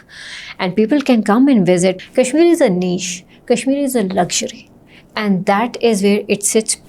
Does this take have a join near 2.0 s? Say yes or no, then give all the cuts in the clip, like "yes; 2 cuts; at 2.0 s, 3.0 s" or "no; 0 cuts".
yes; 1 cut; at 2.0 s